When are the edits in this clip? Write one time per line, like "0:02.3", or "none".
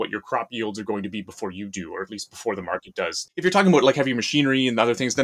0:03.2